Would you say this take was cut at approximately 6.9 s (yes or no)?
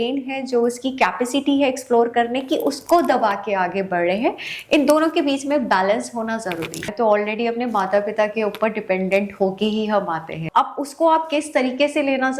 yes